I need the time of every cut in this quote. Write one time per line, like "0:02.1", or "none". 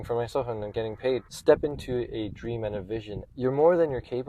0:01.3
0:03.2